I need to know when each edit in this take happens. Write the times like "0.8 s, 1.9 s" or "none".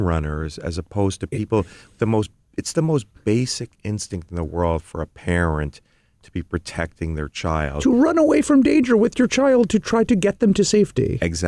none

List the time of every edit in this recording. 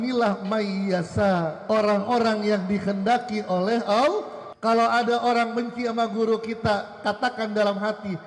1.6 s, 4.4 s

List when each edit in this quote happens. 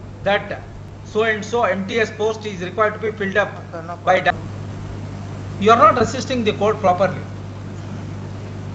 4.3 s

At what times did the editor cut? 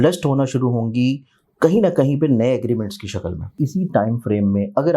3.6 s

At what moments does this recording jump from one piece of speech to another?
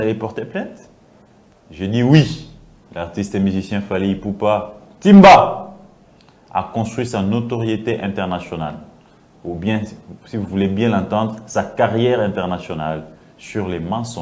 none

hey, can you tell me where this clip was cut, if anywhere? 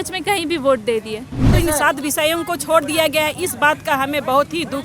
1.5 s

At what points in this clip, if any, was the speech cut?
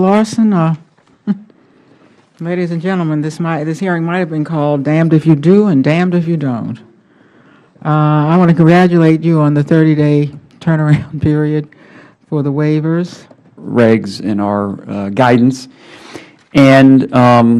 none

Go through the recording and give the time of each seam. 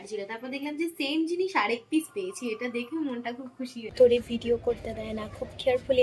3.9 s

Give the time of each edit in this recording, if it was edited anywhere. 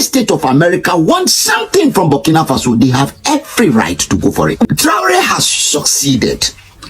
4.6 s

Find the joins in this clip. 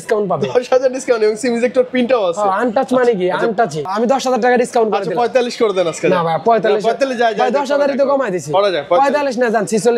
3.9 s

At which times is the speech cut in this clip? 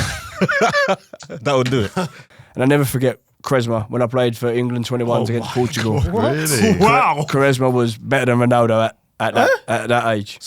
2.2 s

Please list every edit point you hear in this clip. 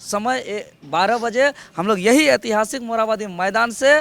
none

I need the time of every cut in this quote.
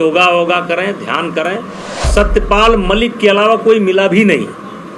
1.9 s

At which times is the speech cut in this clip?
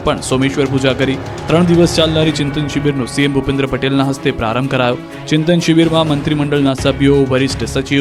none

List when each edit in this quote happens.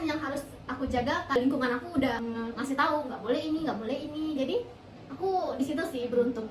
1.4 s, 2.2 s

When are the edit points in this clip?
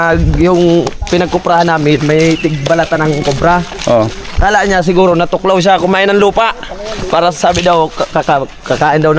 none

